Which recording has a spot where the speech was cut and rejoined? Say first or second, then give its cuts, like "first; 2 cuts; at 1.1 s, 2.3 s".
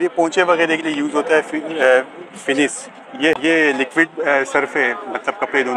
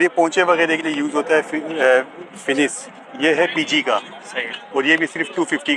first; 1 cut; at 3.4 s